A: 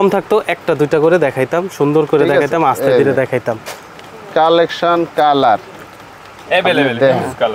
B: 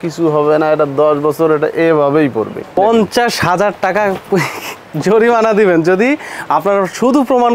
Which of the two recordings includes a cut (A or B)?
B